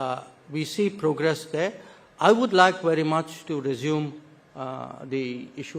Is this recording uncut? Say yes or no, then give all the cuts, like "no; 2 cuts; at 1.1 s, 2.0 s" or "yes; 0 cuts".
yes; 0 cuts